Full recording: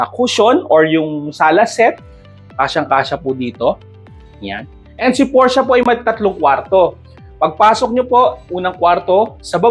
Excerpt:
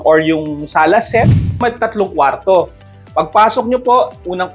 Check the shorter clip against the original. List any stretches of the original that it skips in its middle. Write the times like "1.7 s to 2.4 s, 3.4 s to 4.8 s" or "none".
2.2 s to 5.8 s